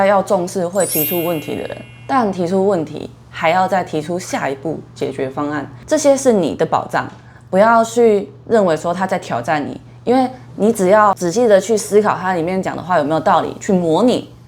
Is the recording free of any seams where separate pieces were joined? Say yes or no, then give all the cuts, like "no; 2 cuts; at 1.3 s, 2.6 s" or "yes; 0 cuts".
no; 1 cut; at 5.7 s